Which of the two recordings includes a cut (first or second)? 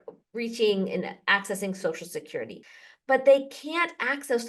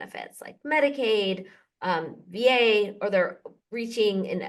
first